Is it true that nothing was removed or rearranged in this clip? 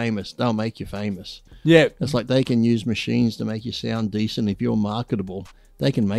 yes; 0 cuts

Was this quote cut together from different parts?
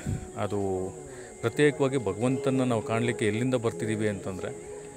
no; 0 cuts

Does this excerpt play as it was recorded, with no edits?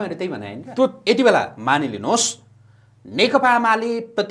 no; 1 cut; at 1.0 s

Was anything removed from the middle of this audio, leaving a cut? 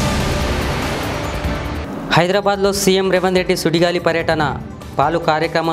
yes; 1 cut; at 1.8 s

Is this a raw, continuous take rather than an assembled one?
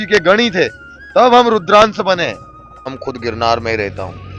no; 1 cut; at 3.0 s

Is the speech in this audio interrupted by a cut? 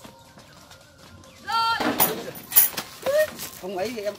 yes; 1 cut; at 1.8 s

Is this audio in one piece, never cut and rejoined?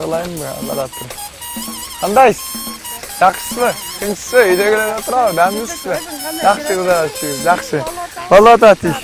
yes; 0 cuts

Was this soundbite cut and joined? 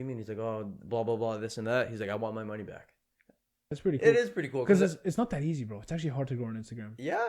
yes; 1 cut; at 3.7 s

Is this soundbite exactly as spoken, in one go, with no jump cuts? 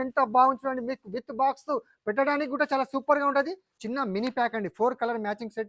no; 1 cut; at 3.6 s

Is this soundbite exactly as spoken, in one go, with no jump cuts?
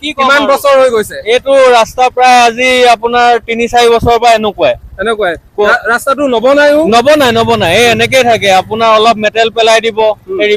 yes; 0 cuts

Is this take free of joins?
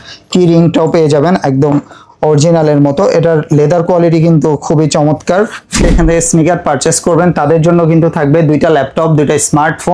no; 1 cut; at 5.8 s

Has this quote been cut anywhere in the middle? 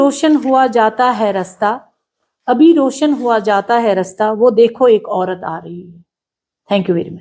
no; 0 cuts

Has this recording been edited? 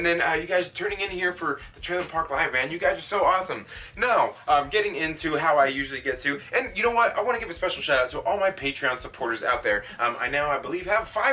no; 0 cuts

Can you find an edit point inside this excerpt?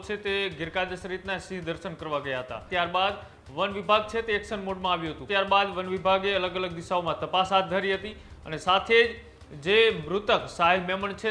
yes; 2 cuts; at 2.6 s, 5.3 s

